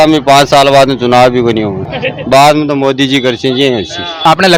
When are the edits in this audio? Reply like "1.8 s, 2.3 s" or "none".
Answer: none